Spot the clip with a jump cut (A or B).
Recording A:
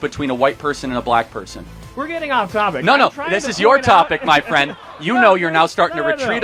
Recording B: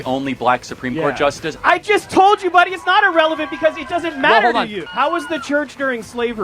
B